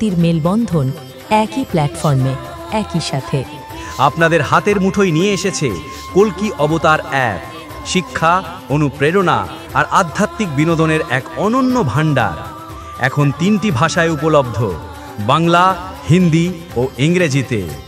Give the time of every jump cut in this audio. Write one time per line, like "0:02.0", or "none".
none